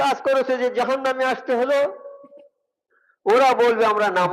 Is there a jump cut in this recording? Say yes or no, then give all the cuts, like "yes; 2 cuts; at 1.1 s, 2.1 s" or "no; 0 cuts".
no; 0 cuts